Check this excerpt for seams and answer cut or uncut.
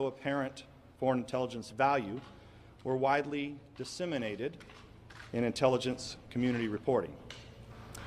uncut